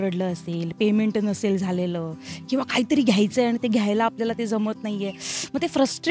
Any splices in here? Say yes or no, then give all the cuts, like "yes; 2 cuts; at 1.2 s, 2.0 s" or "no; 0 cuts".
no; 0 cuts